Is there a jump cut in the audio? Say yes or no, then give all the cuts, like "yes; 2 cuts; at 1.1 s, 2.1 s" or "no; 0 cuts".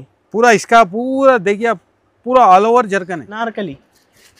yes; 1 cut; at 3.2 s